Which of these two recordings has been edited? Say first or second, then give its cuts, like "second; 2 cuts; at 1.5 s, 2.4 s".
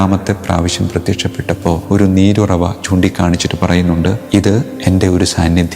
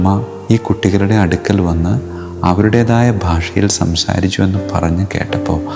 first; 2 cuts; at 1.8 s, 4.6 s